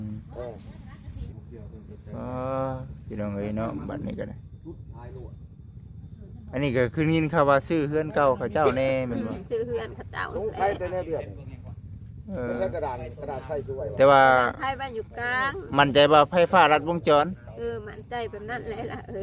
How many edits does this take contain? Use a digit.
1